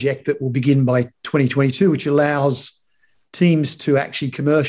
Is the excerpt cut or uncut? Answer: uncut